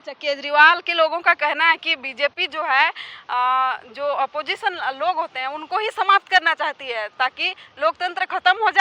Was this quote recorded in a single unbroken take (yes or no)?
yes